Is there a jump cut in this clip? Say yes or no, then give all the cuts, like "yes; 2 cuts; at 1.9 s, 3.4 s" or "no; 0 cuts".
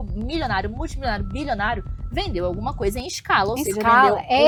no; 0 cuts